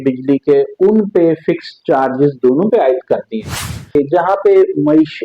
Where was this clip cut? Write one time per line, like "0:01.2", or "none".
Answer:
0:04.0